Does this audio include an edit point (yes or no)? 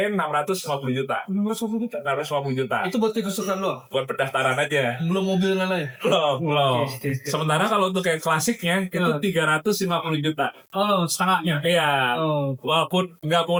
no